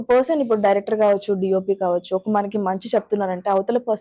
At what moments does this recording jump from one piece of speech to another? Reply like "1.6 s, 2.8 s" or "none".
none